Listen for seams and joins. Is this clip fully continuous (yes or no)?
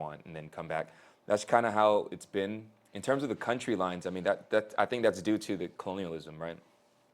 yes